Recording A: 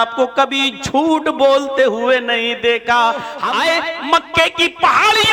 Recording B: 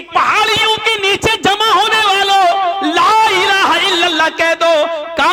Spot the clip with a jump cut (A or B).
A